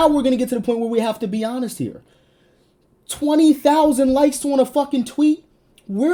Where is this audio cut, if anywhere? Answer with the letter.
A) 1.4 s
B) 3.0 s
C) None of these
C